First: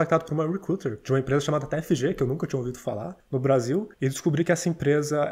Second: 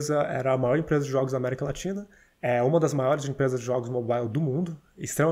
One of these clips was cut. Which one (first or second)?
first